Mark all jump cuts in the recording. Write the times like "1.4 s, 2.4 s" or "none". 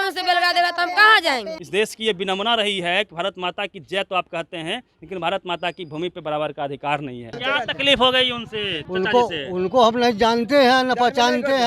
1.6 s, 7.4 s

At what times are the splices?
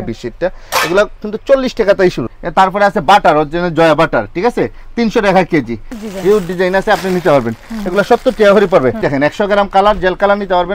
2.3 s, 5.9 s, 9.0 s

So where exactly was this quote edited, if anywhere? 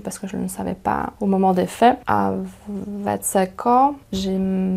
2.0 s

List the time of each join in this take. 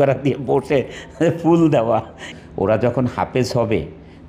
2.3 s

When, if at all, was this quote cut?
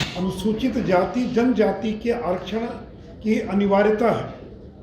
none

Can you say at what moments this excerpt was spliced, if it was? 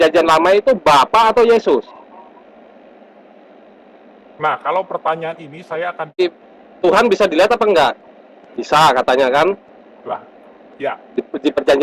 6.2 s

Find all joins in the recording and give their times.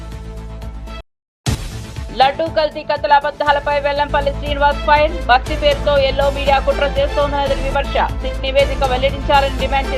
1.0 s

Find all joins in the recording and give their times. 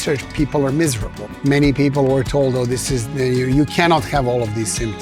none

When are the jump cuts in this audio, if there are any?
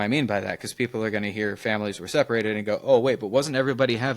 none

